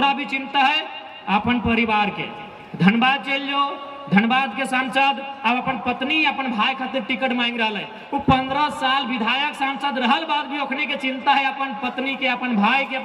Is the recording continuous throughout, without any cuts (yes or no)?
yes